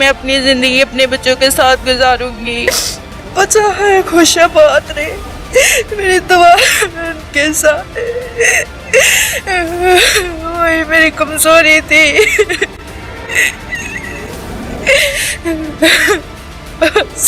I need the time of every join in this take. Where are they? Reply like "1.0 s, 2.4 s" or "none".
2.8 s